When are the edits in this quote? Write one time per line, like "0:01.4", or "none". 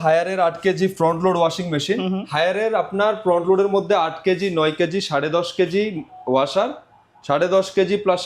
none